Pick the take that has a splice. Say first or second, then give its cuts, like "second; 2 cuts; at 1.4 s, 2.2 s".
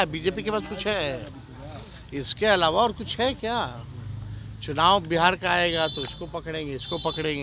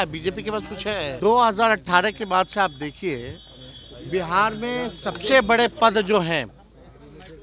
second; 1 cut; at 1.1 s